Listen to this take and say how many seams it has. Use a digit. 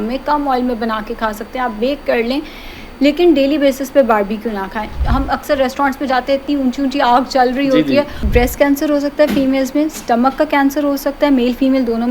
2